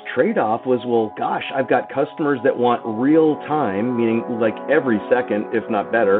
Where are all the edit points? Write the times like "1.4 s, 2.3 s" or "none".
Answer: none

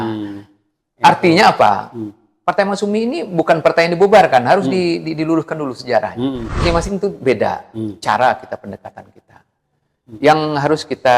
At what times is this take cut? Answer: 6.6 s

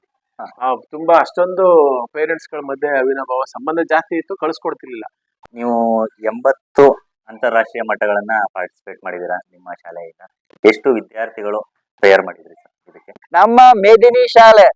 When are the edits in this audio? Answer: 5.2 s, 13.3 s

